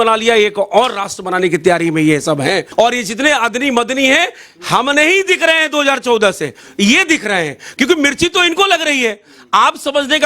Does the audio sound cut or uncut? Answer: cut